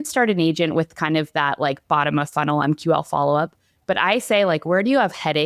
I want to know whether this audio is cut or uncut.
uncut